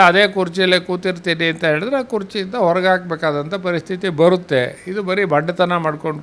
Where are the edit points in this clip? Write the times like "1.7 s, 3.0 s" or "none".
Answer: none